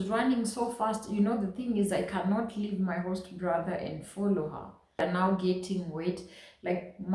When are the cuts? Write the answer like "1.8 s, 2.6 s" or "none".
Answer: 5.0 s

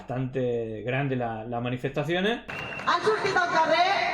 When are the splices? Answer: 2.5 s

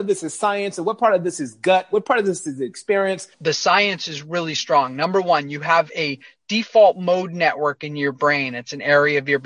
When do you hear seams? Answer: 3.4 s

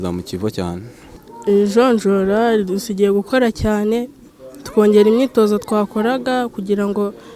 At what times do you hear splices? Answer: 1.0 s

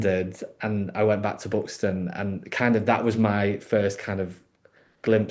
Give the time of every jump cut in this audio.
none

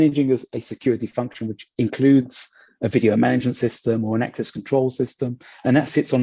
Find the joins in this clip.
none

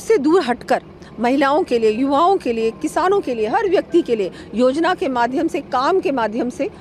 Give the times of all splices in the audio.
none

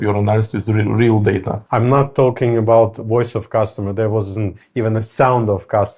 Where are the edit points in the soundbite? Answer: 1.6 s

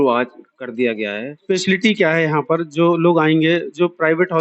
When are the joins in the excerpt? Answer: 1.4 s

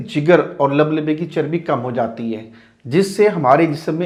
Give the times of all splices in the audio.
none

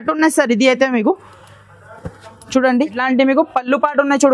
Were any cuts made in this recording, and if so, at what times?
3.0 s

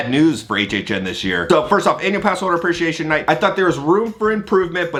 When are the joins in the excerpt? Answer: none

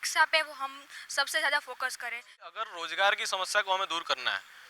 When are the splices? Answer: 2.5 s

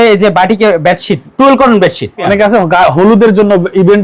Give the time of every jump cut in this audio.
1.2 s, 2.2 s

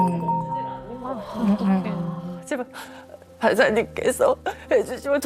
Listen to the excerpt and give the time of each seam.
2.4 s

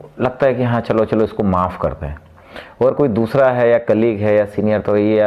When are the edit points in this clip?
none

